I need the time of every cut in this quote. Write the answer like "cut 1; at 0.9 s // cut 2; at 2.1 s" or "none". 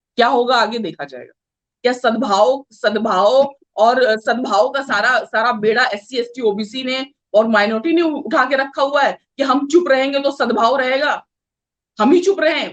cut 1; at 1.7 s